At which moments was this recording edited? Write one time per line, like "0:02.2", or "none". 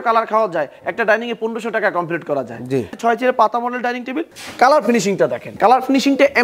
0:02.9
0:04.3
0:05.4

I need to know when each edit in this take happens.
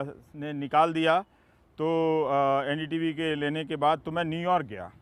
none

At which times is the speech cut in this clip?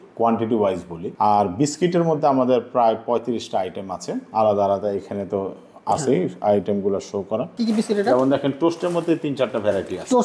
0:01.0
0:07.5

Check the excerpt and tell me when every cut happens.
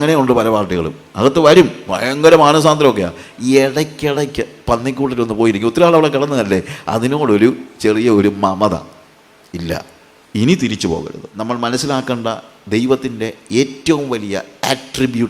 0:11.2

